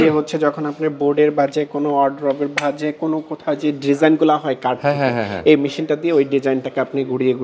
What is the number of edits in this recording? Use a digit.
0